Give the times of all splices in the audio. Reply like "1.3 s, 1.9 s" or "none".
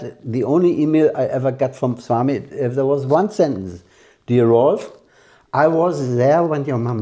none